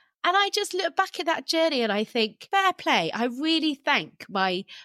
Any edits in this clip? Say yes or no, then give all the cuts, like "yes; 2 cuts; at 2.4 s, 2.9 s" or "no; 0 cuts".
yes; 1 cut; at 2.4 s